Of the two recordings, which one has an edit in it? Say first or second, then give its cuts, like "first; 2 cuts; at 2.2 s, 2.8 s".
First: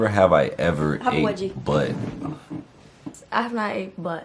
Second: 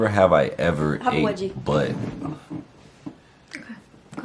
first; 1 cut; at 3.2 s